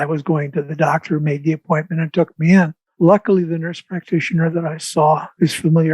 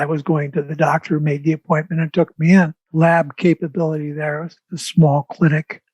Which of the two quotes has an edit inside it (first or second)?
second